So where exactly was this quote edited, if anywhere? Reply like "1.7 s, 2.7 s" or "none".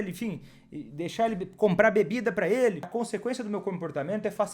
2.9 s